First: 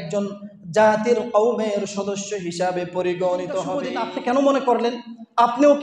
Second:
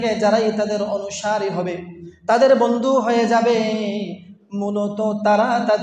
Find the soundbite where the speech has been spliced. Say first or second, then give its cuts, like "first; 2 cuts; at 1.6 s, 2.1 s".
first; 1 cut; at 3.9 s